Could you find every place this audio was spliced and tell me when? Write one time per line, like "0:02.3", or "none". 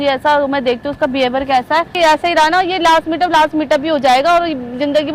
0:01.9